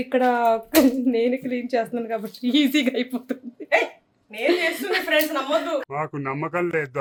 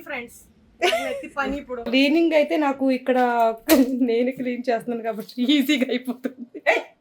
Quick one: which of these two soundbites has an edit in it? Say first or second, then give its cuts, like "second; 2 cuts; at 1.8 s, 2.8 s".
second; 1 cut; at 1.9 s